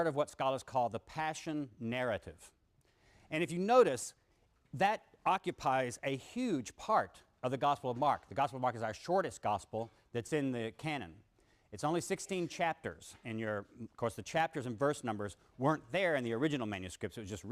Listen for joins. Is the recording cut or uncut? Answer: cut